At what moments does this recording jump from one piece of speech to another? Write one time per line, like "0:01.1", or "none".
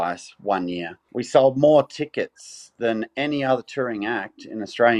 0:01.0